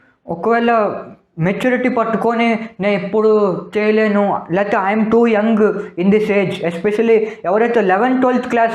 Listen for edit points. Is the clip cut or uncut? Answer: uncut